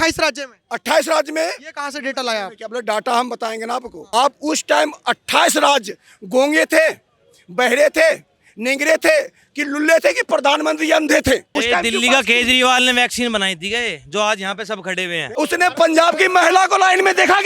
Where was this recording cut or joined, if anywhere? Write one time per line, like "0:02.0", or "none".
0:03.9
0:11.5
0:15.2